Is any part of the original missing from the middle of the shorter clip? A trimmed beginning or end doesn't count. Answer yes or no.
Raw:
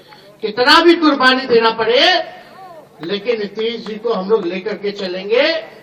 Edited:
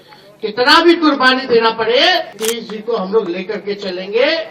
yes